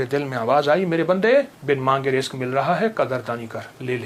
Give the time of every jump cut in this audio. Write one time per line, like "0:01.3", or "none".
0:01.6